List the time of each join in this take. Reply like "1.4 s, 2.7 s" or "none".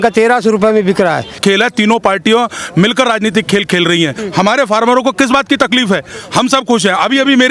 1.4 s, 4.2 s, 6.2 s